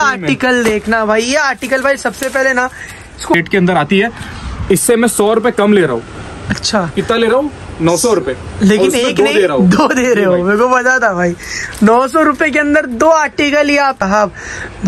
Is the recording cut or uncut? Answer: cut